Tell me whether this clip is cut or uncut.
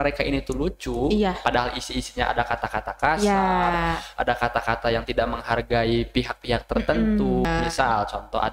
cut